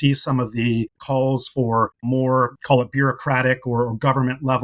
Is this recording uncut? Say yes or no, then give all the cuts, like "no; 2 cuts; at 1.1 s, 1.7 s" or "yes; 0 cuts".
no; 1 cut; at 1.0 s